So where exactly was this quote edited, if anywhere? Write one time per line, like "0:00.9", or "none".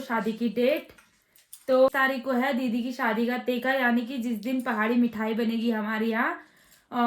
0:01.9